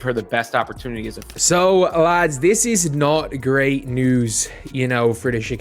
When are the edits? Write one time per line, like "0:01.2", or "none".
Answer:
0:01.3